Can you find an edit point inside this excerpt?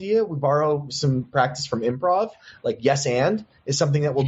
yes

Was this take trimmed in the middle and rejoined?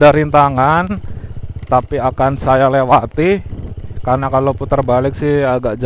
no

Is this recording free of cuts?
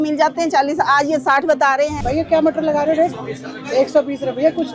no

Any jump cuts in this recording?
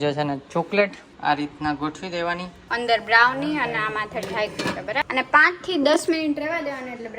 yes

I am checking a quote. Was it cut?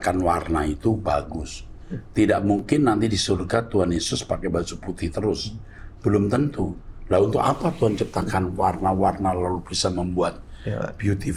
no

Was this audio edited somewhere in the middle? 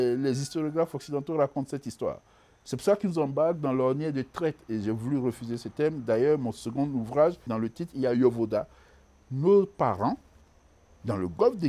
yes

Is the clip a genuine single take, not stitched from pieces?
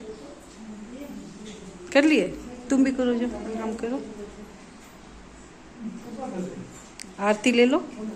yes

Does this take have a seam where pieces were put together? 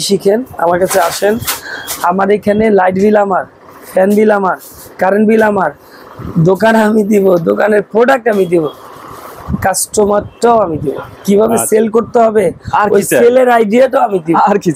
no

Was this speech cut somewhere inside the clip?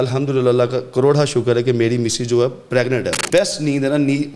yes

